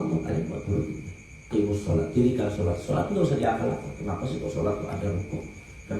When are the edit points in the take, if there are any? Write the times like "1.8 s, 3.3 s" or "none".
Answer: 1.4 s